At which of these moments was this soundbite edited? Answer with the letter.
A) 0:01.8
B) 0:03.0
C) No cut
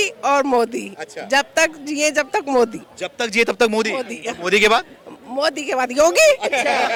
C